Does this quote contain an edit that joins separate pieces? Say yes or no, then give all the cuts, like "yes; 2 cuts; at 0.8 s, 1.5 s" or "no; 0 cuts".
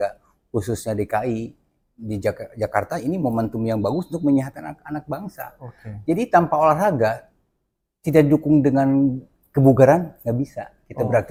no; 0 cuts